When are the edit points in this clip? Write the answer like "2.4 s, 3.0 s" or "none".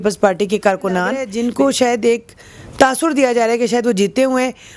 1.3 s